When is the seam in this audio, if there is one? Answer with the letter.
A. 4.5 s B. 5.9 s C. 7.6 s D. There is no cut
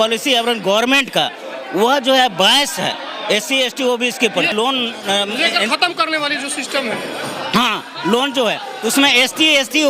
A